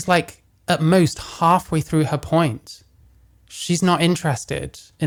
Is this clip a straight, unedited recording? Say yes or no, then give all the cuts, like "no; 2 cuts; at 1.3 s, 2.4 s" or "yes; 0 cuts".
yes; 0 cuts